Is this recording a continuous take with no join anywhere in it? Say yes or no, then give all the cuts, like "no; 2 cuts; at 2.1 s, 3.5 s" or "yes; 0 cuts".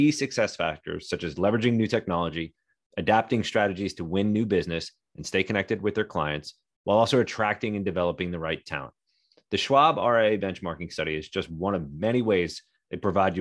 yes; 0 cuts